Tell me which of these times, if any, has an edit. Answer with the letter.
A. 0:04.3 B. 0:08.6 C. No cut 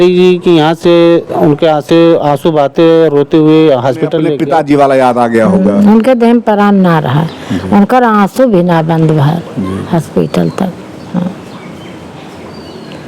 A